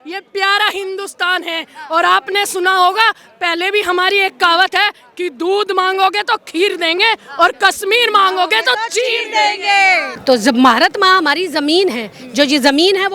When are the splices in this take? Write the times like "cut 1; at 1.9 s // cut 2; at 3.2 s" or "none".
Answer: cut 1; at 10.1 s

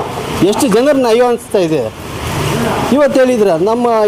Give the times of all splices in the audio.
none

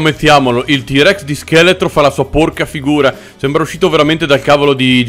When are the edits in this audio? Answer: none

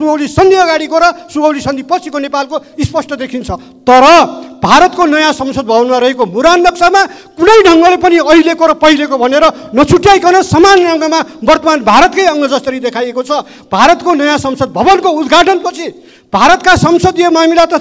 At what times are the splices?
none

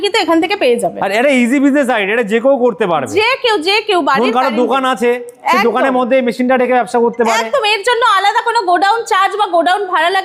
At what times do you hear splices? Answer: none

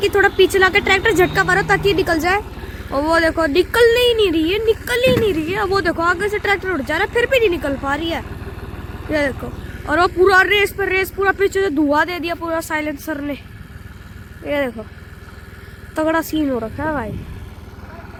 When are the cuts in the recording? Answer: none

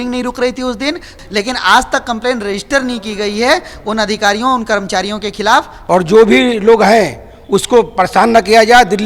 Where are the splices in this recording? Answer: cut 1; at 1.2 s // cut 2; at 5.7 s

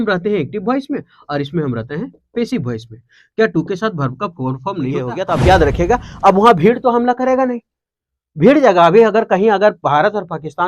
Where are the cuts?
cut 1; at 5.1 s

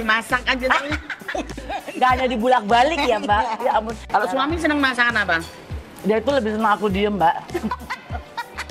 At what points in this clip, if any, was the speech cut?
cut 1; at 4.0 s

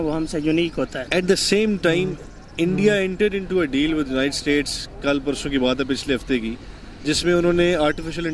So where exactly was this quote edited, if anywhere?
cut 1; at 1.0 s

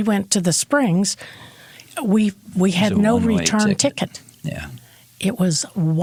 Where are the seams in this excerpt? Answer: none

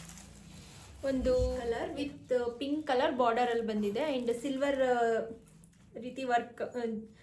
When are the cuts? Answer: cut 1; at 1.7 s

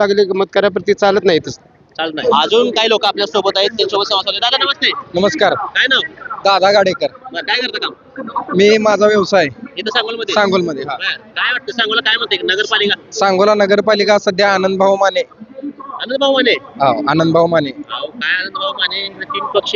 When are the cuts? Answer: none

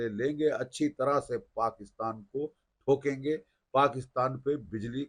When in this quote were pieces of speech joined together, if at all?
none

